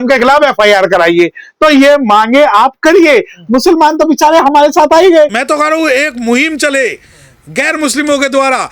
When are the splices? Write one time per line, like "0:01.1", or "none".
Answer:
0:05.4